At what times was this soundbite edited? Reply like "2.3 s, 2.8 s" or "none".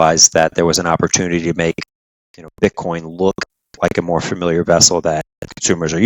none